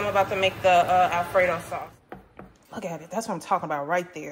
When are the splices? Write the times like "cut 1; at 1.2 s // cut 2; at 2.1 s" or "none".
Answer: cut 1; at 1.7 s